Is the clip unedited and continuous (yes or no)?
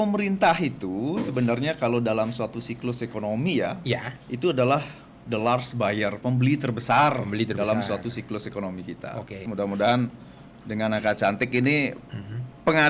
no